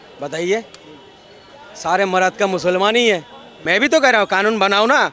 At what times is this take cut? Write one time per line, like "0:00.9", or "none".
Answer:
0:03.5